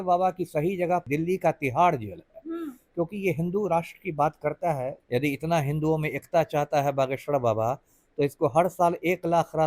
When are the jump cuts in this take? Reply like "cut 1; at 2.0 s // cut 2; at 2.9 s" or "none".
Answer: cut 1; at 1.0 s // cut 2; at 5.0 s